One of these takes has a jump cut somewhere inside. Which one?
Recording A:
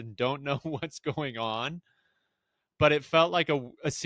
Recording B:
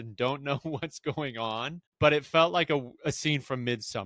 B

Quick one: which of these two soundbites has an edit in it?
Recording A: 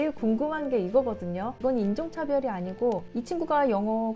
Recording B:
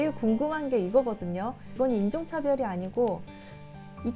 A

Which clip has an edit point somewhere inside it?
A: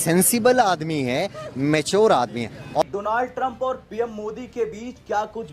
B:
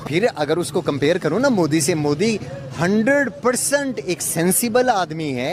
A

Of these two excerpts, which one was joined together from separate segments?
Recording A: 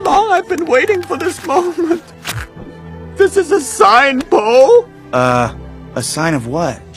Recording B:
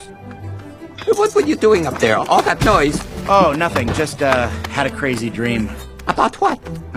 B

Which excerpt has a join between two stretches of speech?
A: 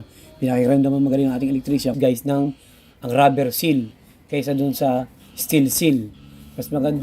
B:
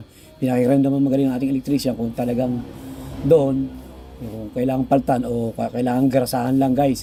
A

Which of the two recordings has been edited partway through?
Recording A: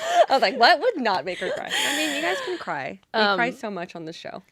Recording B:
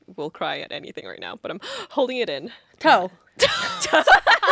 B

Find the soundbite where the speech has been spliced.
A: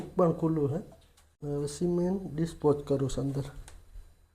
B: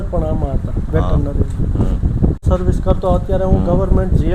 B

